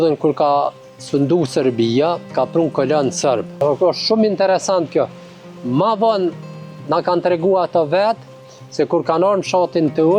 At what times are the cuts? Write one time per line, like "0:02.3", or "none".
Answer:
0:03.5